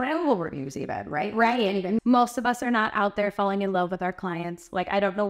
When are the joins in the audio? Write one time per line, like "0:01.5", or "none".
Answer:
0:02.0